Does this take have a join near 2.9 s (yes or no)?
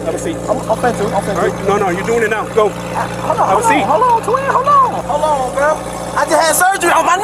no